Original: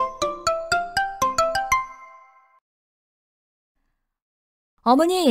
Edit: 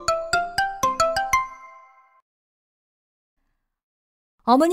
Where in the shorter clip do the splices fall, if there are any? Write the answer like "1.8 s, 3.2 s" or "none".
none

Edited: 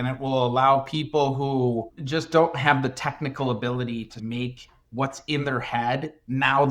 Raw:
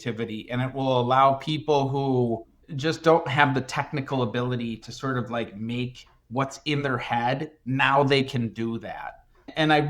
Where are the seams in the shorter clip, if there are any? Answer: 1.9 s, 4.2 s

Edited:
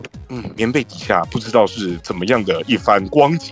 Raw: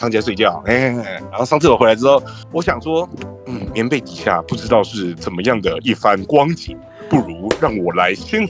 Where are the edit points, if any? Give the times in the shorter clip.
none

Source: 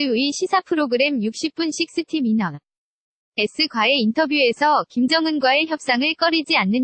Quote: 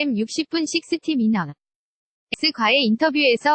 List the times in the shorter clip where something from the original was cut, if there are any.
2.3 s

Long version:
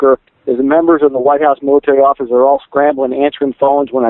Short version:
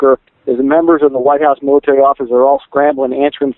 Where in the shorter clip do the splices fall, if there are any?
none

